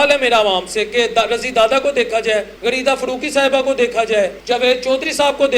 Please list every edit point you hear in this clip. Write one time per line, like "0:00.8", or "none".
0:02.5
0:04.4